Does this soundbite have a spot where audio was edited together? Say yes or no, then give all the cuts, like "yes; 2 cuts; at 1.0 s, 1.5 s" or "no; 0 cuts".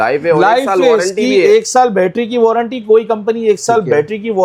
no; 0 cuts